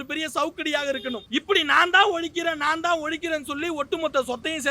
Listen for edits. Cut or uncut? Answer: cut